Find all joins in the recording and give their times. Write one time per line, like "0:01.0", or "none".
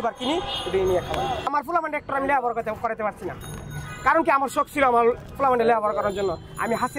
0:01.5